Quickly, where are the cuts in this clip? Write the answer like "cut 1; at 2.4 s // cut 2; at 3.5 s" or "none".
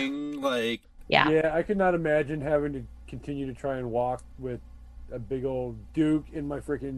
cut 1; at 0.9 s // cut 2; at 5.8 s